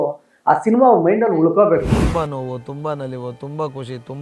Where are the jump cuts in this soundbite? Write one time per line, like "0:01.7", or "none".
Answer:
0:02.0